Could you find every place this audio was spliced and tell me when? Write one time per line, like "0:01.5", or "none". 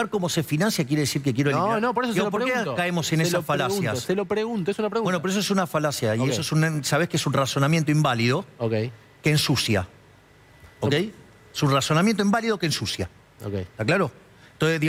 none